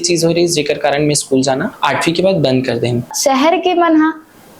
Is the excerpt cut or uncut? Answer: cut